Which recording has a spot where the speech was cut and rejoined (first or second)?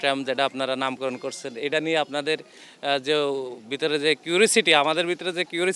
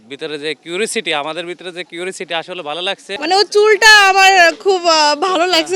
second